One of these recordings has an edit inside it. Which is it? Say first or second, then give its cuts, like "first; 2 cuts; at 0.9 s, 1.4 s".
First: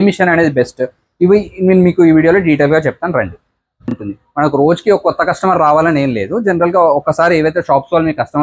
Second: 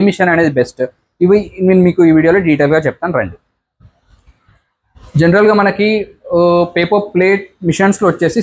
first; 1 cut; at 4.0 s